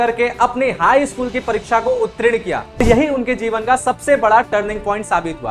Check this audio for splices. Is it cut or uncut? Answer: cut